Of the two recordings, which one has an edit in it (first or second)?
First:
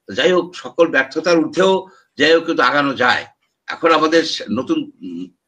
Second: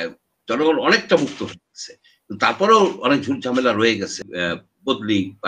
second